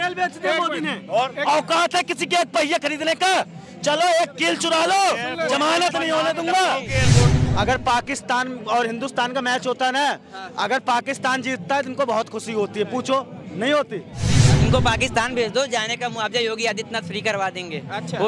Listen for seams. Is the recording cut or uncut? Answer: cut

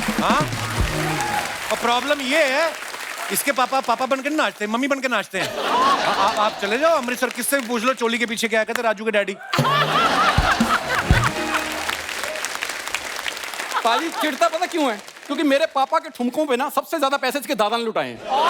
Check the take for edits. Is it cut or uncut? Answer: uncut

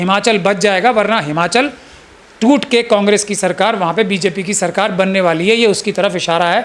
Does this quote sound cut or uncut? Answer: uncut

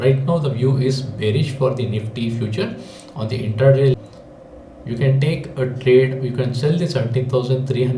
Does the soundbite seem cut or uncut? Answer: cut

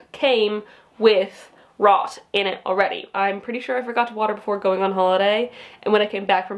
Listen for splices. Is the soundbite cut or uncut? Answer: cut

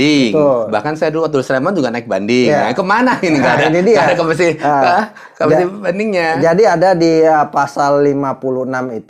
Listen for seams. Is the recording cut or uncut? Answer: uncut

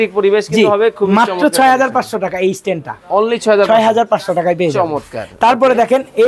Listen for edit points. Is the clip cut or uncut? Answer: uncut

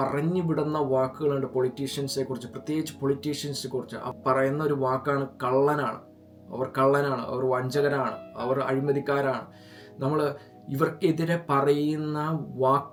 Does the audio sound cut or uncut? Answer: uncut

